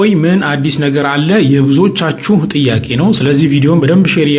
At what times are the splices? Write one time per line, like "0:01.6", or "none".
none